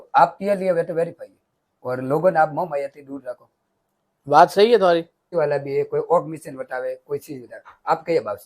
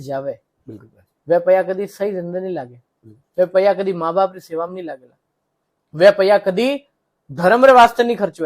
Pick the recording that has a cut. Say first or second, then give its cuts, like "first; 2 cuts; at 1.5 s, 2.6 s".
first; 1 cut; at 5.3 s